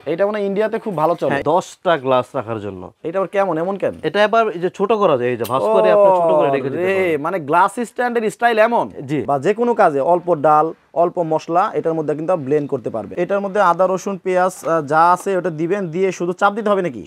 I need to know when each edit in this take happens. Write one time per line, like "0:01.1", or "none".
0:01.4
0:09.2
0:13.1